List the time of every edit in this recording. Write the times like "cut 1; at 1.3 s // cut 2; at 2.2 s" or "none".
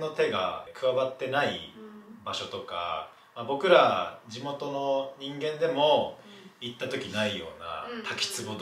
none